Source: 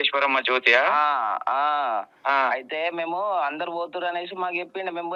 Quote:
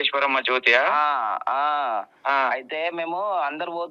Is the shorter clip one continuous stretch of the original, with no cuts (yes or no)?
yes